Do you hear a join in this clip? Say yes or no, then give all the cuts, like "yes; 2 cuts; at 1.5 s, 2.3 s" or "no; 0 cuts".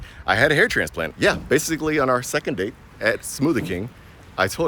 yes; 1 cut; at 1.1 s